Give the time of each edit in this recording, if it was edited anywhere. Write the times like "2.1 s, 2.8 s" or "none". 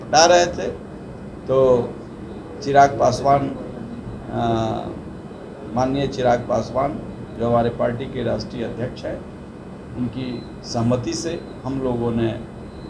none